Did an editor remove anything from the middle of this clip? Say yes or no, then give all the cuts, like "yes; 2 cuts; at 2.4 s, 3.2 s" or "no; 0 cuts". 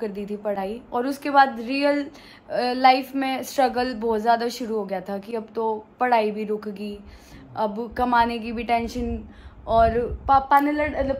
no; 0 cuts